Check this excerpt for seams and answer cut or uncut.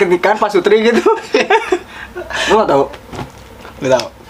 uncut